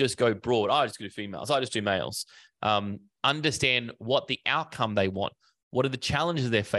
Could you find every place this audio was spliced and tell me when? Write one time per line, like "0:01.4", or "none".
none